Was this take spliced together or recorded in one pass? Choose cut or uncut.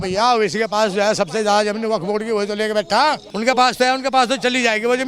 cut